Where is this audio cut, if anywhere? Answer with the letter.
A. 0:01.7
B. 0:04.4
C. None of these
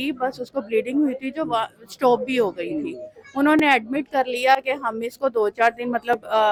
C